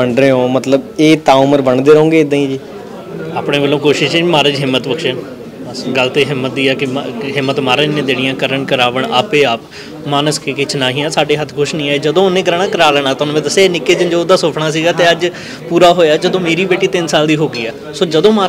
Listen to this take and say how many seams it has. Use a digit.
0